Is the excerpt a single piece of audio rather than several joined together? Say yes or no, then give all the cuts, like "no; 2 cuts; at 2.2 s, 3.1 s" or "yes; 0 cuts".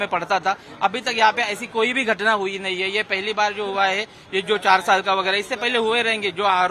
yes; 0 cuts